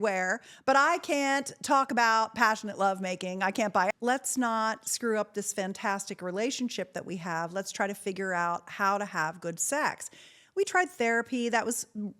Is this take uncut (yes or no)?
no